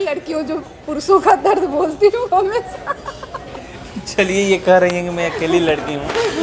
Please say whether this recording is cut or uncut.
uncut